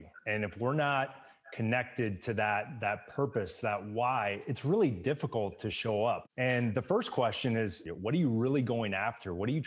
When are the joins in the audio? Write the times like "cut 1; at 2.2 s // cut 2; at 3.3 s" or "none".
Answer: cut 1; at 6.2 s // cut 2; at 7.8 s